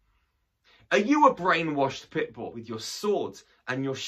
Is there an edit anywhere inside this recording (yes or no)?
yes